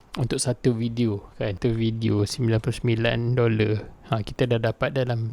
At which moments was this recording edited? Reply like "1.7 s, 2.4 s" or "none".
1.6 s